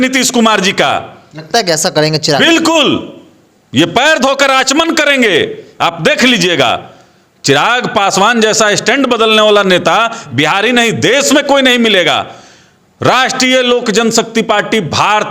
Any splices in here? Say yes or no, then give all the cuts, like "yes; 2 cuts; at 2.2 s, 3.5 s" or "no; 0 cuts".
no; 0 cuts